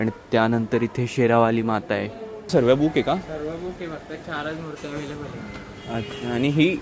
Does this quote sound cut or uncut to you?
cut